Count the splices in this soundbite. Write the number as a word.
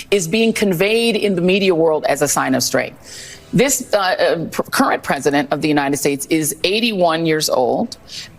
one